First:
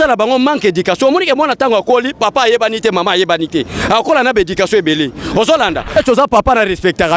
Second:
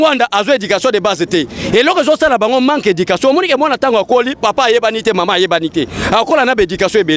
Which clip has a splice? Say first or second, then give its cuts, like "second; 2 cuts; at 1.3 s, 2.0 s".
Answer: first; 1 cut; at 5.9 s